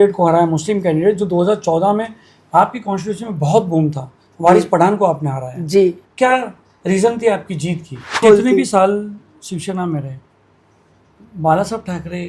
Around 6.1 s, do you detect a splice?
yes; 2 cuts; at 6.1 s, 8.2 s

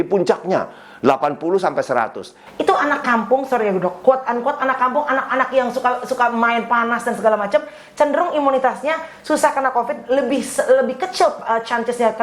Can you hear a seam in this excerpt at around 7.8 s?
no; 1 cut; at 2.4 s

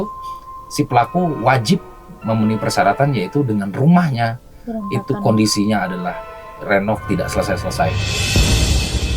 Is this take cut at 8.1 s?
yes; 1 cut; at 8.1 s

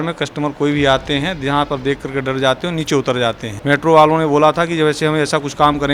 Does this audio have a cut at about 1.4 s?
no; 1 cut; at 3.5 s

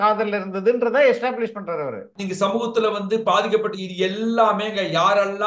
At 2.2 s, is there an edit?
yes; 1 cut; at 2.2 s

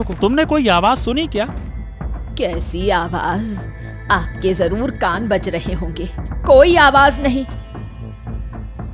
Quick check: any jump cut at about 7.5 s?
yes; 1 cut; at 7.5 s

